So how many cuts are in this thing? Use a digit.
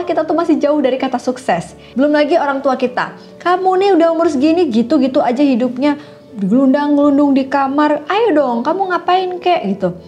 1